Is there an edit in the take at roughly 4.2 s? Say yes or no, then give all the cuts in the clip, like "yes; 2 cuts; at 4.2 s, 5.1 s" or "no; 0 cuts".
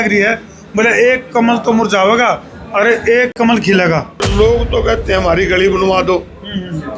yes; 1 cut; at 4.2 s